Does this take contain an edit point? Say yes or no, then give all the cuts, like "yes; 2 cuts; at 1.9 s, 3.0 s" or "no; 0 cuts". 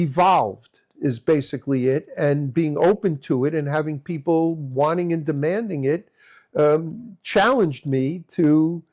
no; 0 cuts